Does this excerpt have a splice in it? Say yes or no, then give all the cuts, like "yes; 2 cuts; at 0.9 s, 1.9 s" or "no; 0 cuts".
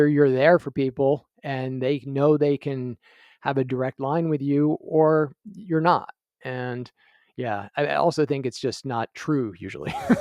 no; 0 cuts